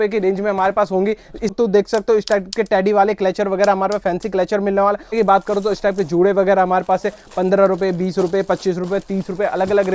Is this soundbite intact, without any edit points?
no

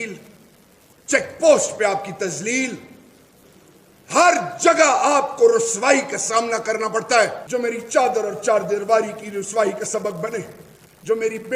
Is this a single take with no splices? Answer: no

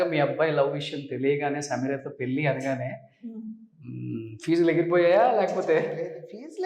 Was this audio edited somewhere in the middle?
no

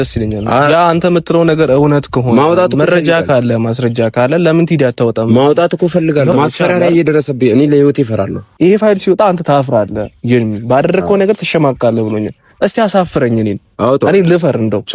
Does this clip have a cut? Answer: yes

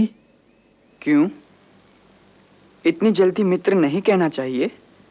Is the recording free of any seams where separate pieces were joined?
yes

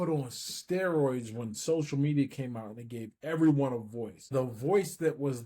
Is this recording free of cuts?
no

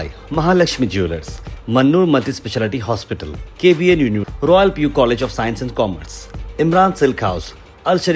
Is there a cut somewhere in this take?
no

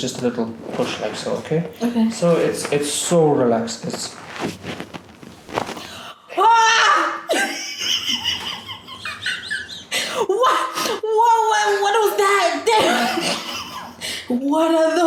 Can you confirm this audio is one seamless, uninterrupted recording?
yes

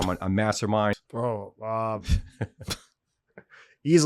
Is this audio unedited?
no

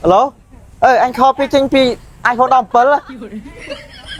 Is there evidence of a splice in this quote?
no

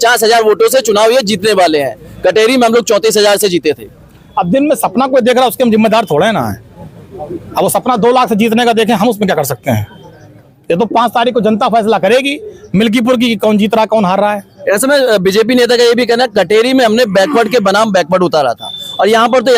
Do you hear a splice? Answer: no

